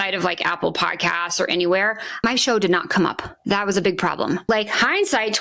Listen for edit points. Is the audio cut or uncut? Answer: cut